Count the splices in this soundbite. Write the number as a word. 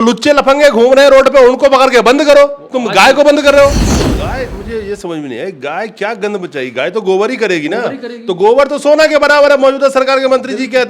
one